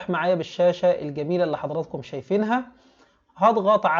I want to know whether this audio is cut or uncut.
uncut